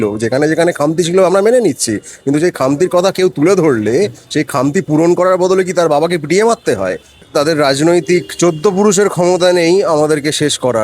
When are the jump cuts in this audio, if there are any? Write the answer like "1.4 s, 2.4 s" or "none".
7.2 s